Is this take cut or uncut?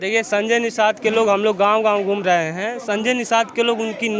uncut